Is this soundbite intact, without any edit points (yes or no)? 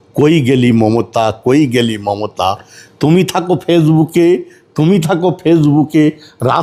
yes